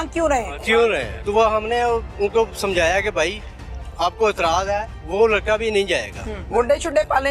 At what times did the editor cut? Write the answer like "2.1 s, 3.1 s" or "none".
1.1 s, 5.0 s, 6.4 s